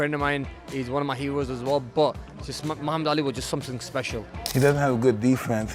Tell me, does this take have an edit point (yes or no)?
yes